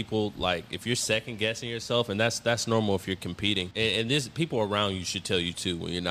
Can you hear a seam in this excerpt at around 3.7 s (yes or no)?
yes